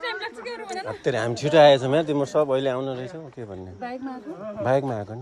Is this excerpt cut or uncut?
uncut